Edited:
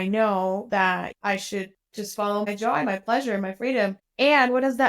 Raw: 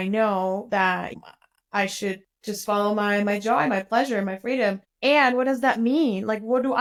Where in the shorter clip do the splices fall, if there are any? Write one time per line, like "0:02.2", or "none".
0:01.1
0:02.5